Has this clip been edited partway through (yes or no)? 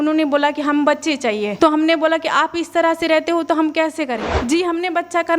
yes